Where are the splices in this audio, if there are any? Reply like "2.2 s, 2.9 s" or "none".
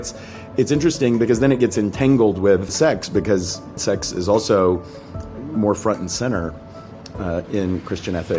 2.7 s, 3.8 s